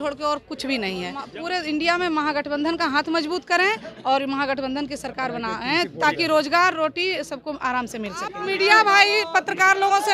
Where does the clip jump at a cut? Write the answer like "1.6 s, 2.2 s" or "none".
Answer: 1.3 s, 8.4 s